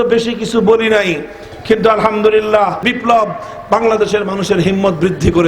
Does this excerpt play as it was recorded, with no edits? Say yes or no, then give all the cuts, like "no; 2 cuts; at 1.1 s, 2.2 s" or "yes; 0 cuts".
no; 1 cut; at 2.9 s